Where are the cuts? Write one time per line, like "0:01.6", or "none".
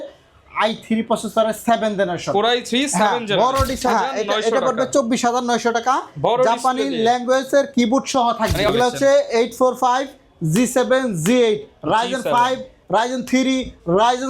0:03.8
0:08.7